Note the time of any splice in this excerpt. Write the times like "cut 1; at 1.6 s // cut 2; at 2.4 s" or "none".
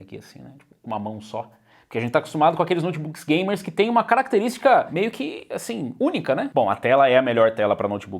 cut 1; at 6.5 s